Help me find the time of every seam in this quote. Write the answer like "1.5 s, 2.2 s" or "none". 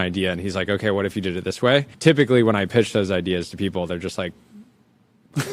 1.9 s